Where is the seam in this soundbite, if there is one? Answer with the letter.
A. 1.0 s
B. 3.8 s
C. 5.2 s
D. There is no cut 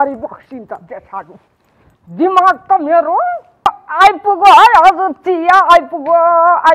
B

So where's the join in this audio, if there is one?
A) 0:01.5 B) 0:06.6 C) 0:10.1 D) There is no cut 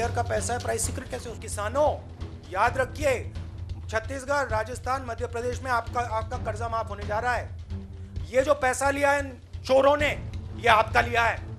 A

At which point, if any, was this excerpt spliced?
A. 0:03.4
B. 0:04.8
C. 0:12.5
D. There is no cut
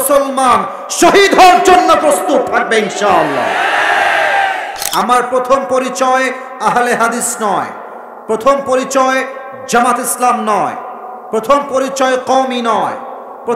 B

